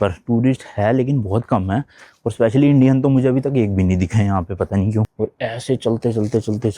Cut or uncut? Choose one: cut